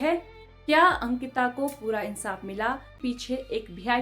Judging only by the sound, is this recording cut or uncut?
cut